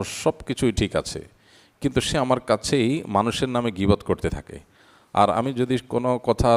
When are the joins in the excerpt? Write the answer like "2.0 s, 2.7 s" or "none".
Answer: none